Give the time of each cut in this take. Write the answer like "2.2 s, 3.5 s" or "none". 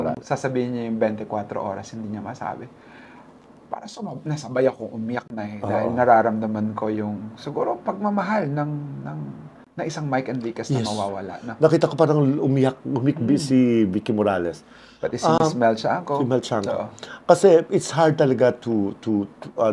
none